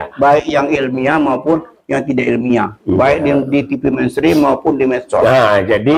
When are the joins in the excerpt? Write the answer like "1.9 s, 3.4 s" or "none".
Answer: none